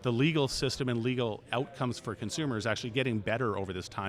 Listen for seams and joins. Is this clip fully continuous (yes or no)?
yes